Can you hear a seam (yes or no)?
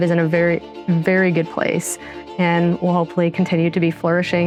no